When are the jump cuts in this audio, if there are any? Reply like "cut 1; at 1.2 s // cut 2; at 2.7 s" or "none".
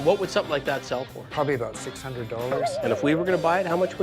cut 1; at 1.2 s // cut 2; at 2.7 s